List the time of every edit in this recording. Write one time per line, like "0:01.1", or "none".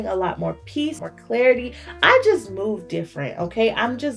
0:01.0